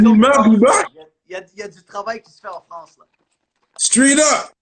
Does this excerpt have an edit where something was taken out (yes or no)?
no